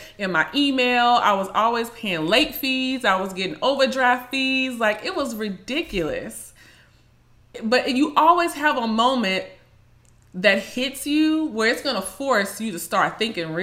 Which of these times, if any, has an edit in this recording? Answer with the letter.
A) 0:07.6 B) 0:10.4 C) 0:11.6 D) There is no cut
A